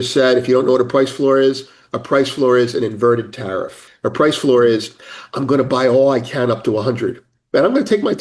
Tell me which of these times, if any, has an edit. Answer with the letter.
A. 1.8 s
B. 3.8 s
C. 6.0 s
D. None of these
B